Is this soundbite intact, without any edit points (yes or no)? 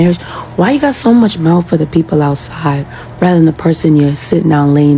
yes